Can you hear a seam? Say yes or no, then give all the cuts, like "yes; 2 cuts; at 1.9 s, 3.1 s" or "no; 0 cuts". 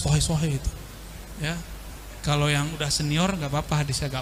no; 0 cuts